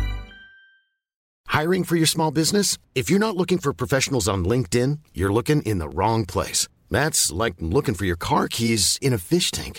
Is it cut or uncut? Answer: cut